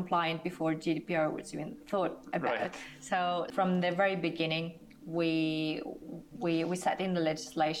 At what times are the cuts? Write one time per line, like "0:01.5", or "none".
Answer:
0:03.5

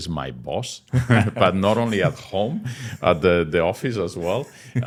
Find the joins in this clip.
none

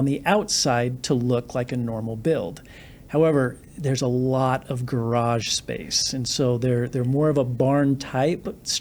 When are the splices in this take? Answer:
none

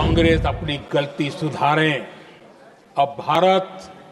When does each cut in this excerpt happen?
none

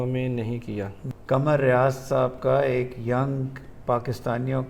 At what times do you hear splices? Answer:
0:01.1

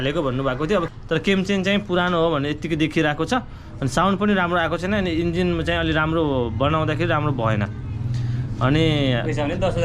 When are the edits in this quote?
0:00.9

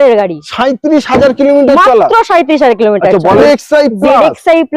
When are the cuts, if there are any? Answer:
0:03.4

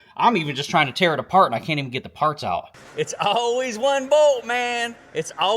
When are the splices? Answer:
0:02.8

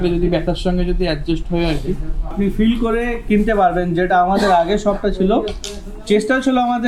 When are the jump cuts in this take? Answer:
0:02.3

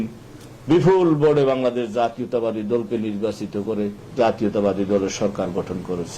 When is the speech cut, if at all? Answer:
0:04.0

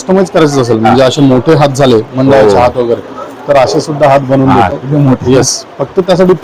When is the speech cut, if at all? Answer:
none

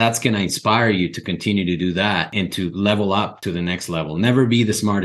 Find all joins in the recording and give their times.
0:03.4

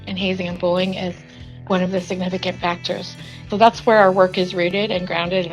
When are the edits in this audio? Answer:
0:01.5
0:03.4

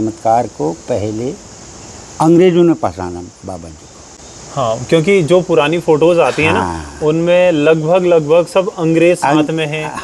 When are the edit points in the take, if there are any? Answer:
none

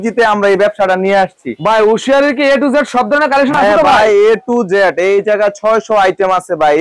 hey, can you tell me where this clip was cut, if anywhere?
none

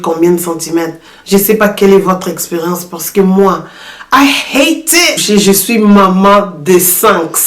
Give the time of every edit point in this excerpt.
0:05.2

